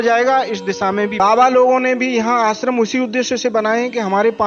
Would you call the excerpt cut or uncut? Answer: cut